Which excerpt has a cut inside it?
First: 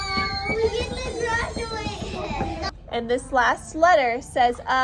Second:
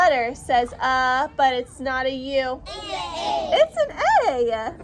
first; 1 cut; at 2.7 s

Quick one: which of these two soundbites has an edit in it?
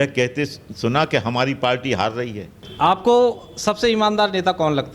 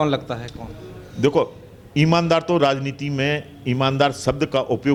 first; 1 cut; at 2.6 s

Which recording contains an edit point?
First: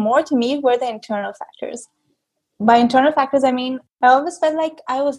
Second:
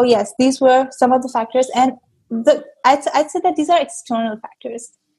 first; 1 cut; at 3.9 s

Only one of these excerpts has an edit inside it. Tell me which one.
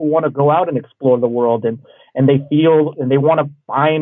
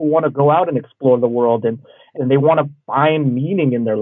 second; 1 cut; at 2.1 s

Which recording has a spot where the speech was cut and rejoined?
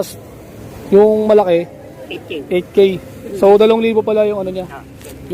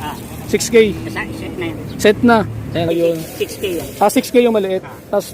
second; 1 cut; at 2.9 s

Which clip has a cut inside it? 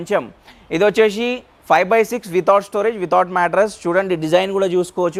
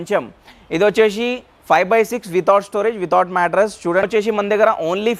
second; 1 cut; at 4.1 s

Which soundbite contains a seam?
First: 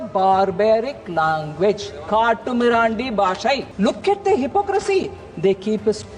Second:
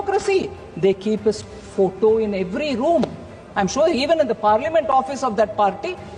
first; 1 cut; at 3.7 s

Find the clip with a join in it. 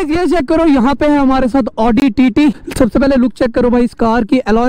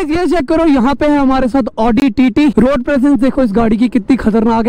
second; 1 cut; at 2.5 s

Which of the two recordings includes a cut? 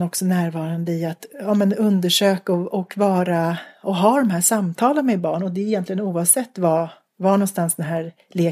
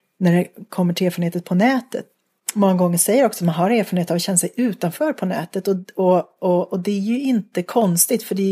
second; 1 cut; at 2.0 s

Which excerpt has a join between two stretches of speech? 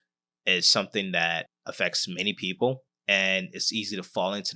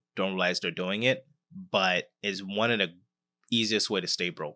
first; 2 cuts; at 1.6 s, 2.9 s

